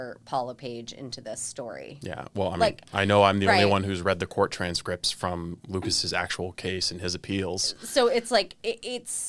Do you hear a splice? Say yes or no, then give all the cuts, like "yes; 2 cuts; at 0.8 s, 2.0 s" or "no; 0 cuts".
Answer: no; 0 cuts